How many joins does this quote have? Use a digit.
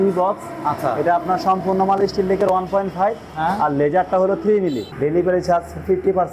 1